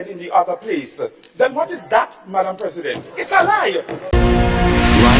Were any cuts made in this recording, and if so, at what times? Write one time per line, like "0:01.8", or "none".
0:04.0